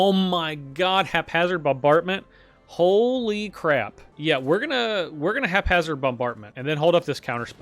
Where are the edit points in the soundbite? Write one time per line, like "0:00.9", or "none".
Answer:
0:04.0
0:06.5